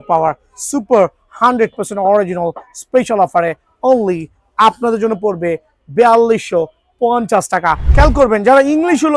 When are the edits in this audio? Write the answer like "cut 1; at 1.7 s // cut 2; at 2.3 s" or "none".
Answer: cut 1; at 7.8 s